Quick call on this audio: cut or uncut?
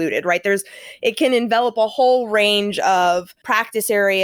cut